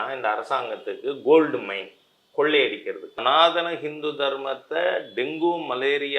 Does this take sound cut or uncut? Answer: cut